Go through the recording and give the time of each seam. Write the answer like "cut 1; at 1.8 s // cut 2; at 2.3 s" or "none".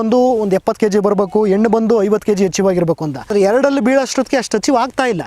cut 1; at 3.3 s